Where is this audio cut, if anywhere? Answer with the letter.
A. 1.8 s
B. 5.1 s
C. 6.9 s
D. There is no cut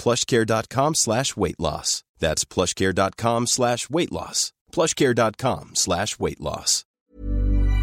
C